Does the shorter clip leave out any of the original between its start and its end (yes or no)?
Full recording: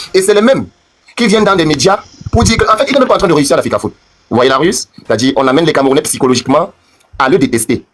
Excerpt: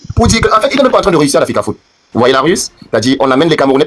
no